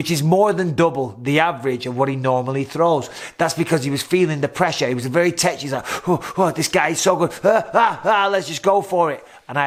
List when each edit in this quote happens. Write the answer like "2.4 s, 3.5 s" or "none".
none